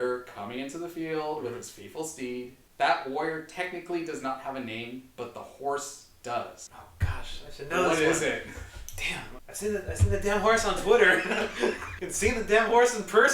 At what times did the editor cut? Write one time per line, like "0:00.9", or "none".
0:09.3
0:12.0